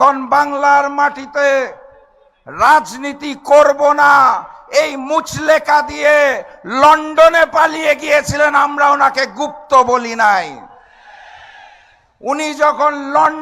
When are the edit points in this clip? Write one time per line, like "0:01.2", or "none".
none